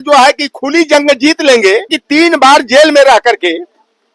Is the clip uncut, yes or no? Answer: no